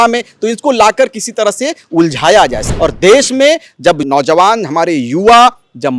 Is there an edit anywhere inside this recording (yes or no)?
yes